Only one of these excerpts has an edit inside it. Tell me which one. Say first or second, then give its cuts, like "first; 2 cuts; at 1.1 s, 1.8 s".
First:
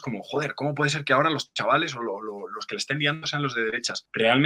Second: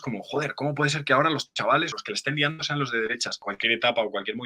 second; 2 cuts; at 1.9 s, 3.4 s